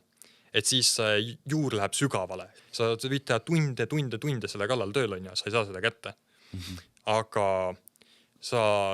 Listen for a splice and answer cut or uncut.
cut